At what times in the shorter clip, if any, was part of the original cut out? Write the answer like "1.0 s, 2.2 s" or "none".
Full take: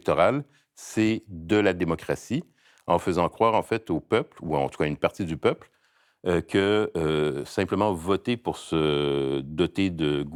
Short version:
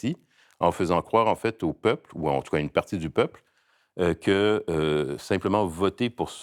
none